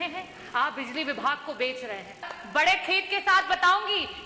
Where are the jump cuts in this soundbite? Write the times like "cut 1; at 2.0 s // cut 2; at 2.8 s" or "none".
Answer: cut 1; at 2.3 s